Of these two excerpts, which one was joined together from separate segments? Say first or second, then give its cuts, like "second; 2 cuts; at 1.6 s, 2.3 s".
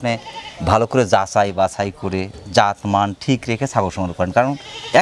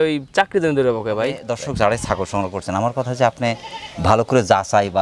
second; 1 cut; at 1.5 s